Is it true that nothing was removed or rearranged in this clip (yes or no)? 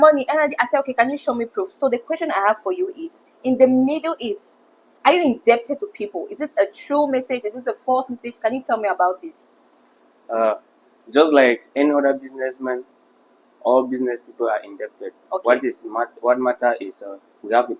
yes